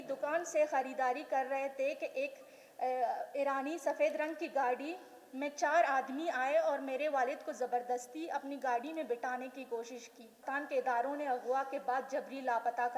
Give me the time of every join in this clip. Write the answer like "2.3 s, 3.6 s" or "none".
10.5 s

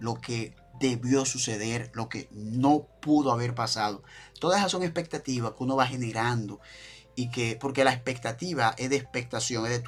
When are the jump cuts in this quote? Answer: none

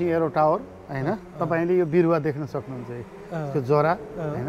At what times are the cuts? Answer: none

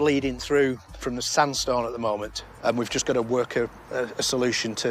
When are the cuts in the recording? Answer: none

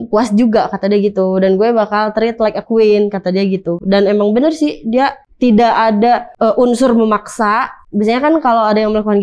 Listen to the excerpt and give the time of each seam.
5.2 s, 6.3 s, 7.8 s

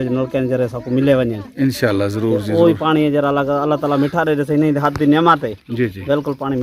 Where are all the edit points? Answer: none

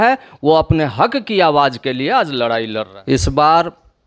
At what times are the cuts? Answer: 2.9 s

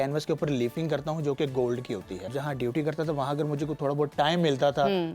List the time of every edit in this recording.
2.3 s

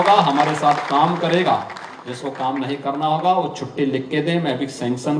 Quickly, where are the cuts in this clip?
none

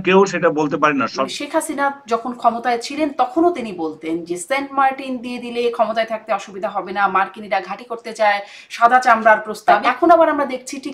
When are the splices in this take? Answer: 1.2 s, 9.8 s

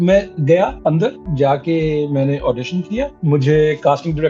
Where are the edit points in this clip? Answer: 1.0 s, 3.1 s

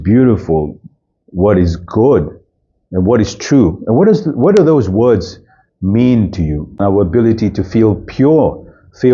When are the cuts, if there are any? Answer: 6.8 s

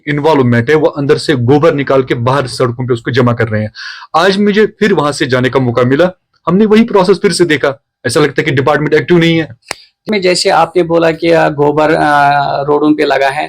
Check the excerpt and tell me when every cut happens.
10.0 s

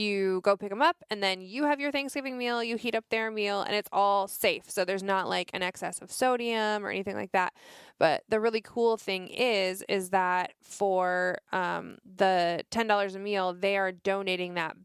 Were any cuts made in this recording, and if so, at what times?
none

